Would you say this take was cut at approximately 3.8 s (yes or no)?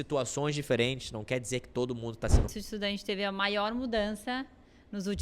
no